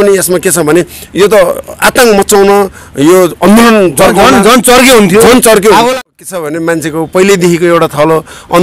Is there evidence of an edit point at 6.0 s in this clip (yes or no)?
yes